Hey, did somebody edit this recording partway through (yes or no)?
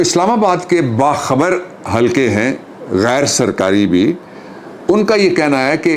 no